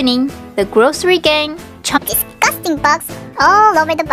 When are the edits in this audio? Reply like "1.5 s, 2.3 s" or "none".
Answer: none